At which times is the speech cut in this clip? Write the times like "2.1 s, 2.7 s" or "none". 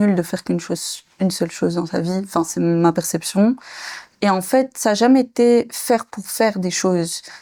none